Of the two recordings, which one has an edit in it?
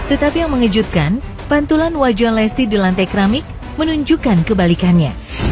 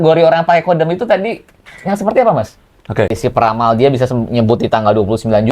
second; 1 cut; at 3.2 s

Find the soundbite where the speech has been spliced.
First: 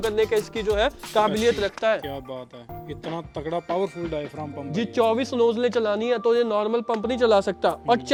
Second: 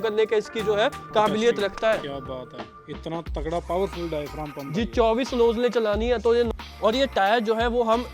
second; 1 cut; at 6.5 s

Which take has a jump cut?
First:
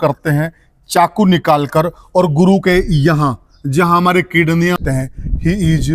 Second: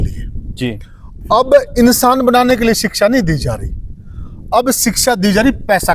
first; 1 cut; at 4.8 s

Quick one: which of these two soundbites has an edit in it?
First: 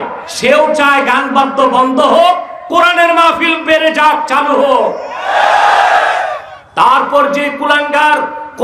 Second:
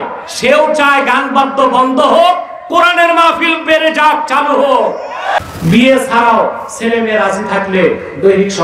second; 1 cut; at 5.4 s

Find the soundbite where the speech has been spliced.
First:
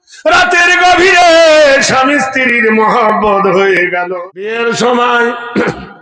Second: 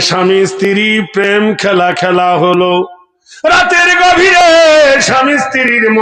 first; 1 cut; at 4.1 s

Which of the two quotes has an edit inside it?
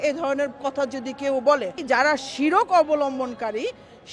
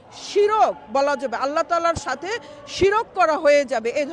first; 1 cut; at 1.8 s

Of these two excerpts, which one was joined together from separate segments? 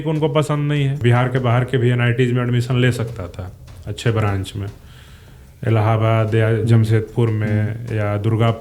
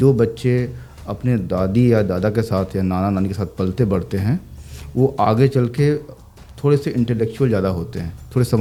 first; 1 cut; at 1.0 s

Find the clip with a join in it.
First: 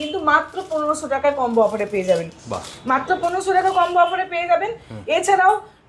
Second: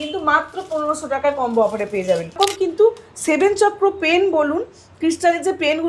second; 1 cut; at 2.4 s

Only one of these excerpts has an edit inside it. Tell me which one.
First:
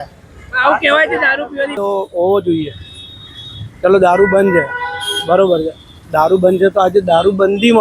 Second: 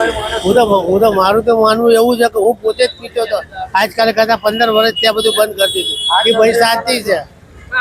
first; 1 cut; at 1.8 s

